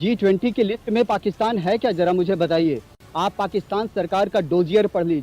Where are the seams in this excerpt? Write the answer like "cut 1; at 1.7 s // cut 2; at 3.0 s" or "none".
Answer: cut 1; at 3.0 s